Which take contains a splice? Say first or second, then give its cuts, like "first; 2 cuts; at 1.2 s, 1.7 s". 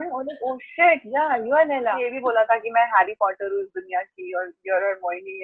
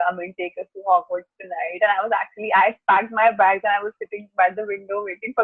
first; 1 cut; at 2.1 s